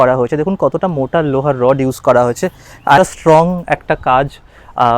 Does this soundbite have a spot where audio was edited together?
yes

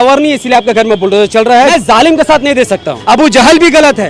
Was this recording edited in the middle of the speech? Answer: yes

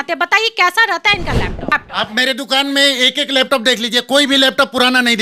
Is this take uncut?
no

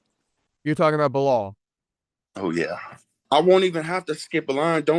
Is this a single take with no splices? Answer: no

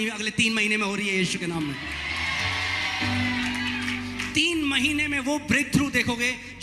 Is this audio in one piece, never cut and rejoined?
yes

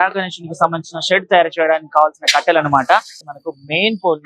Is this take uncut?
no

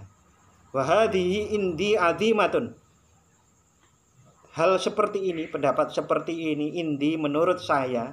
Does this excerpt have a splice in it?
no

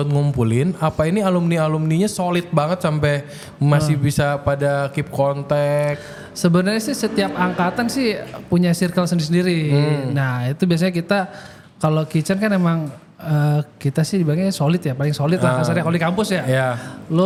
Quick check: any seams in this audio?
no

